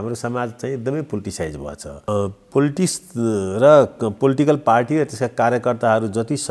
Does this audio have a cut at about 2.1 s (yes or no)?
yes